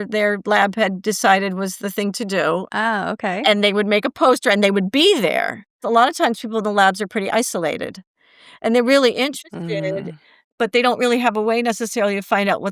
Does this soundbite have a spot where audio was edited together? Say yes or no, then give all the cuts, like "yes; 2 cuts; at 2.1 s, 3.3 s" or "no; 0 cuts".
yes; 2 cuts; at 2.7 s, 5.8 s